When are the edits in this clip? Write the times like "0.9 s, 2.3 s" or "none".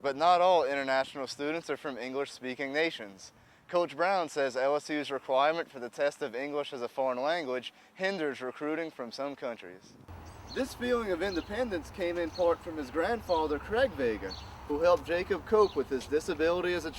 10.1 s